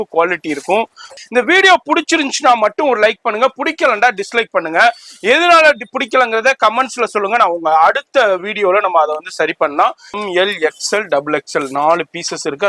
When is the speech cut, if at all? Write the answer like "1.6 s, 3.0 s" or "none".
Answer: 1.1 s, 10.2 s